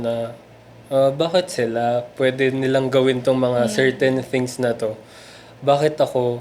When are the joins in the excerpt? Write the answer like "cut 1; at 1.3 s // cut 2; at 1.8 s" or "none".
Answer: none